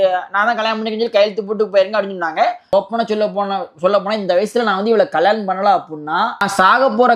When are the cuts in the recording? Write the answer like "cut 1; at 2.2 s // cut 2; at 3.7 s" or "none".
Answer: cut 1; at 2.7 s // cut 2; at 6.4 s